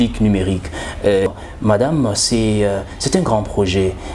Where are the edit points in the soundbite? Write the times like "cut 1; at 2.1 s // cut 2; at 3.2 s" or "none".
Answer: cut 1; at 1.3 s